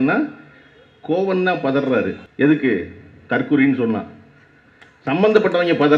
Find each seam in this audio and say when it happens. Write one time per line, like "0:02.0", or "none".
0:02.2